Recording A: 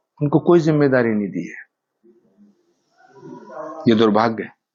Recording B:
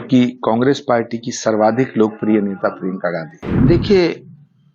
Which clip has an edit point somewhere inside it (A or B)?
B